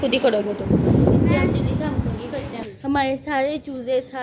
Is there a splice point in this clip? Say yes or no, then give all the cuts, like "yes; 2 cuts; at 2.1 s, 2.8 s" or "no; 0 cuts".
yes; 1 cut; at 2.7 s